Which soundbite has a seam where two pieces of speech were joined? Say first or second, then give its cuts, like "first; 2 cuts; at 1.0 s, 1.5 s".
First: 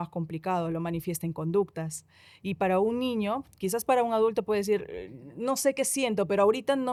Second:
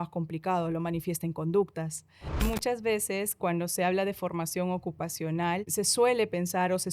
second; 2 cuts; at 2.4 s, 5.7 s